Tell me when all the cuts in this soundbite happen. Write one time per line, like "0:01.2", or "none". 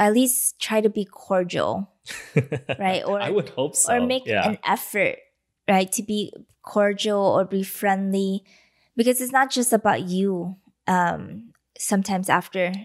none